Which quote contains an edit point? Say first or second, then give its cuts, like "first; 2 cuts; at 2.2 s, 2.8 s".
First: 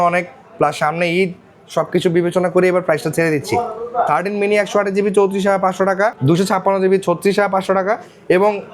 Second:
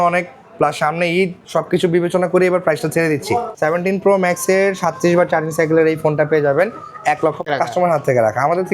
second; 3 cuts; at 1.4 s, 3.5 s, 7.5 s